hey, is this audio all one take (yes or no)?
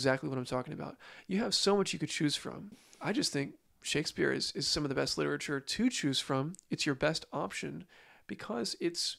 no